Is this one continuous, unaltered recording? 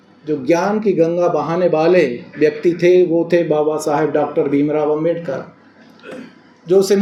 yes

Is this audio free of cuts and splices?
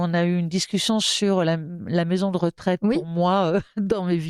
yes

